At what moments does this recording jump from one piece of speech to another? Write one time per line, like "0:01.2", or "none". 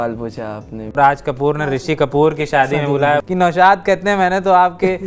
0:00.9
0:03.2